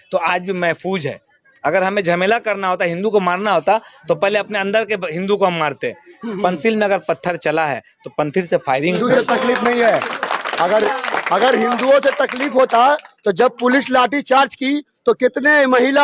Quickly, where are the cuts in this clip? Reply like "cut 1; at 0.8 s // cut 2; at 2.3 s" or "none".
cut 1; at 9.0 s